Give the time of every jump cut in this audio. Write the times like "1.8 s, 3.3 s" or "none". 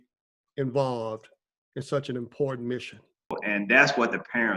3.4 s